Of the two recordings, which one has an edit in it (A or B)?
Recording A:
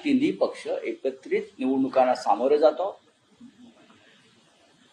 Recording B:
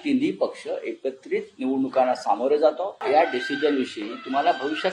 B